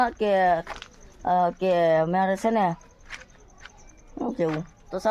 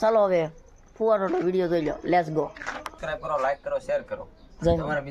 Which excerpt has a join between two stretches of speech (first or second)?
second